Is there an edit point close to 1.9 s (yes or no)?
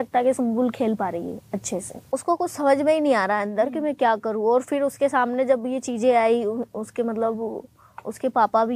yes